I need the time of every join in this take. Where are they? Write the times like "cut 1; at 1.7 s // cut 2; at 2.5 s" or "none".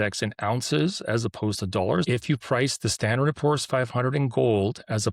cut 1; at 2.0 s